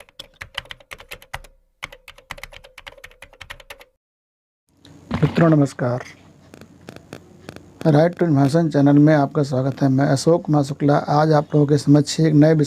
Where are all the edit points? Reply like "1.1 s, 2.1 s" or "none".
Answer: 4.8 s